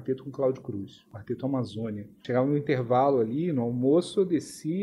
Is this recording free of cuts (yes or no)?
no